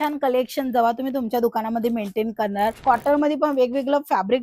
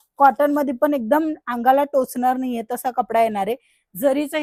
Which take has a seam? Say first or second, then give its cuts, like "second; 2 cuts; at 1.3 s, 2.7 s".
first; 1 cut; at 2.8 s